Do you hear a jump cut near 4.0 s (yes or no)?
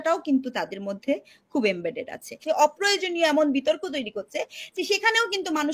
no